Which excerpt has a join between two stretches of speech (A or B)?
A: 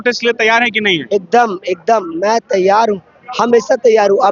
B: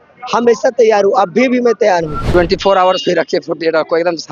B